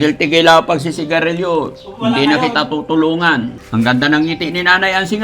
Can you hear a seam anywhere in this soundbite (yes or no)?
yes